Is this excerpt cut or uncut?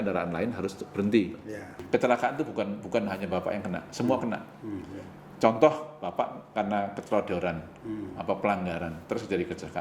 cut